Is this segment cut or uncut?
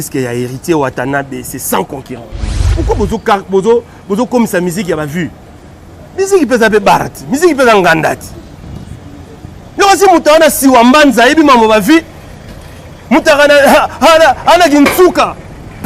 cut